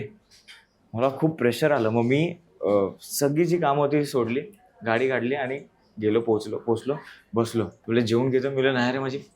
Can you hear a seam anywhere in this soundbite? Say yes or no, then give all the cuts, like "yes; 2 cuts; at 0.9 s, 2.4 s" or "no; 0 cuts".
yes; 1 cut; at 7.8 s